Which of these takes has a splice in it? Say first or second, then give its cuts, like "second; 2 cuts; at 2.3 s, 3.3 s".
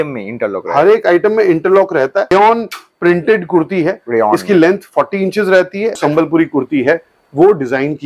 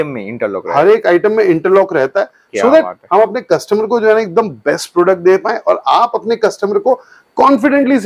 first; 2 cuts; at 2.3 s, 6.0 s